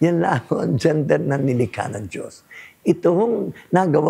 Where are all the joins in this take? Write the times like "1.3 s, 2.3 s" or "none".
none